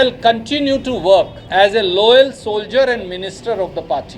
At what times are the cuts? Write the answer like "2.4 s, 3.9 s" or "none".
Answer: 1.4 s